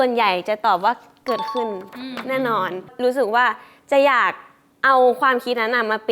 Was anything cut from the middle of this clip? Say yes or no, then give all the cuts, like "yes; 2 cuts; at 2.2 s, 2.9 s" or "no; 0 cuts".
yes; 1 cut; at 2.9 s